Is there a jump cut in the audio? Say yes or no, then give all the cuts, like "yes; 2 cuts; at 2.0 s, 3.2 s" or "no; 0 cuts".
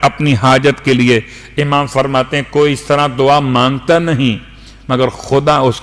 no; 0 cuts